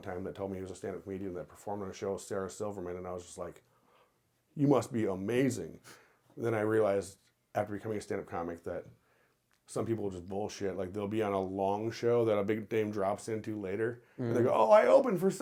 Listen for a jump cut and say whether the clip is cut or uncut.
uncut